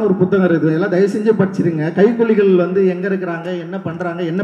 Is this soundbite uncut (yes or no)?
yes